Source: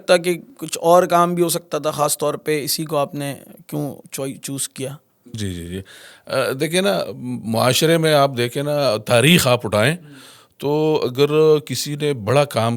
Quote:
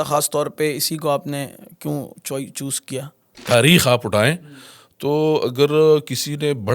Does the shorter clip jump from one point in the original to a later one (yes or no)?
yes